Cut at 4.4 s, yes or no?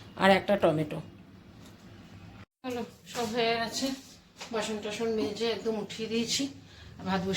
no